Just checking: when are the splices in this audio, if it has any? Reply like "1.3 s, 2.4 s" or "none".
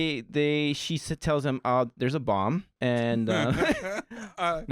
2.7 s